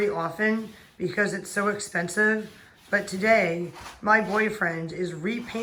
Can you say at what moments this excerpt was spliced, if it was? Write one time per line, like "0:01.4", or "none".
none